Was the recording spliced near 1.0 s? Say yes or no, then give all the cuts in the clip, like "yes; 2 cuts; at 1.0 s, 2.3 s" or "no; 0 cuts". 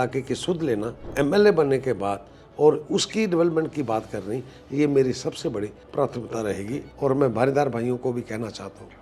yes; 3 cuts; at 1.0 s, 5.8 s, 6.8 s